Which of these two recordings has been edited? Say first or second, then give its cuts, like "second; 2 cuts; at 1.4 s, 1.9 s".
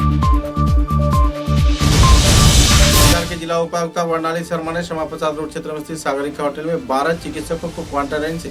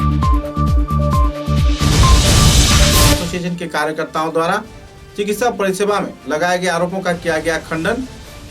second; 1 cut; at 3.1 s